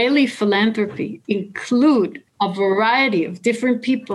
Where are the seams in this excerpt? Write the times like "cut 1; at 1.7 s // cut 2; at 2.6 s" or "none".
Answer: cut 1; at 1.1 s // cut 2; at 2.2 s

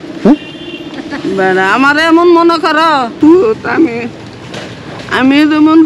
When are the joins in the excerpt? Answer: cut 1; at 3.1 s

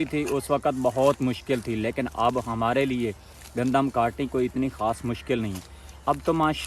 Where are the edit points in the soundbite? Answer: none

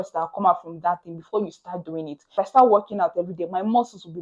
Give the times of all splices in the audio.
cut 1; at 2.3 s

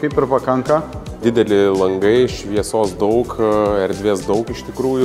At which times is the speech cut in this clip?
cut 1; at 1.2 s

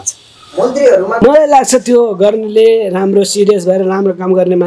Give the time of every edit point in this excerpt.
cut 1; at 1.2 s

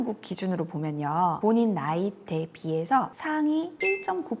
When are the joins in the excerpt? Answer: none

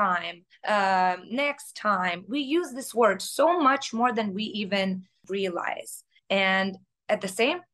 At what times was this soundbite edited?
cut 1; at 5.2 s

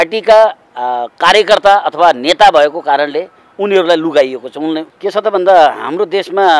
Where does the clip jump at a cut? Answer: cut 1; at 4.9 s

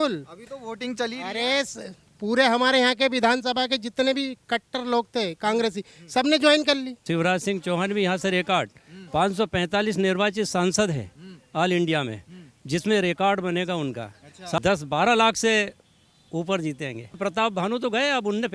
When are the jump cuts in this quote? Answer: cut 1; at 7.0 s // cut 2; at 14.6 s // cut 3; at 17.1 s

